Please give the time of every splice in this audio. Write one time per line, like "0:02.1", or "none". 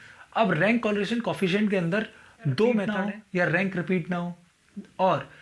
0:02.9